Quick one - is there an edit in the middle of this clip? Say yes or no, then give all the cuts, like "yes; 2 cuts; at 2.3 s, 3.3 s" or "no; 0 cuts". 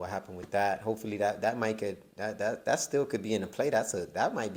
no; 0 cuts